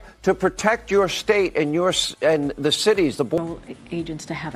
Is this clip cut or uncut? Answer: uncut